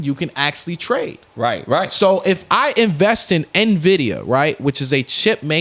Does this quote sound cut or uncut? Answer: uncut